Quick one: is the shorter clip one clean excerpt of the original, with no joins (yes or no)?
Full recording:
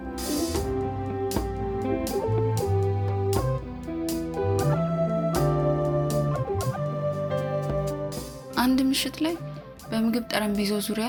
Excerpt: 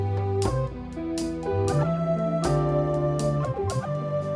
yes